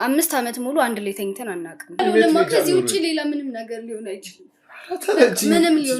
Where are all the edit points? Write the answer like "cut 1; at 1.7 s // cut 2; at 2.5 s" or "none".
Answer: cut 1; at 2.0 s